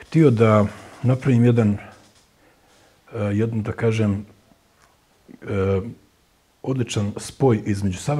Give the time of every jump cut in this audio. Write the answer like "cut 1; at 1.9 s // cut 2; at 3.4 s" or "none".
none